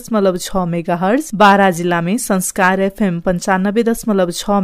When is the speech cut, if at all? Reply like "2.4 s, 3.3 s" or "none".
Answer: 1.3 s